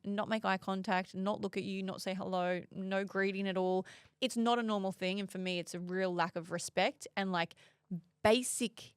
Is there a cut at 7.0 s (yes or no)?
no